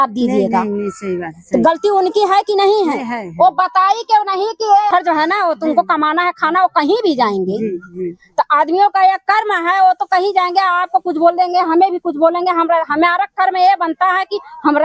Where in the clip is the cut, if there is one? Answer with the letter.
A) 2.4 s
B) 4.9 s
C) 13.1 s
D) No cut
B